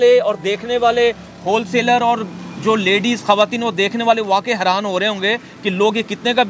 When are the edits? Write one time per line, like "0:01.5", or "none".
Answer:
none

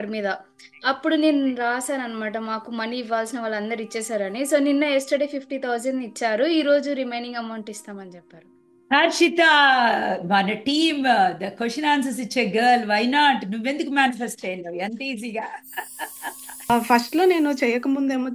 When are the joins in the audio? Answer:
0:16.7

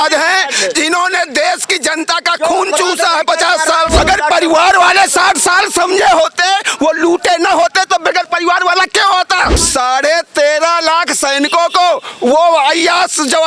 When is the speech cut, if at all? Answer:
0:04.0
0:09.6

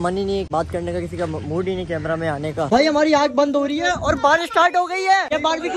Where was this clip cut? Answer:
0:02.7

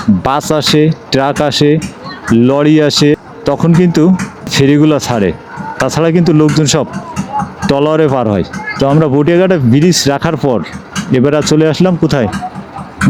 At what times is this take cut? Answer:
none

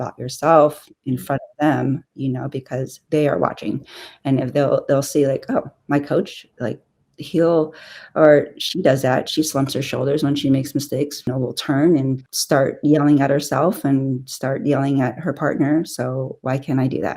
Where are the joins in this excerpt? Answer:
0:12.3

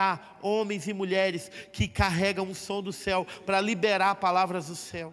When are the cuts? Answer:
none

